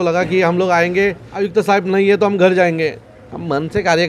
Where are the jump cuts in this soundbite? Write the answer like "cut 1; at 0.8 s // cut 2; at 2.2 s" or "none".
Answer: cut 1; at 1.3 s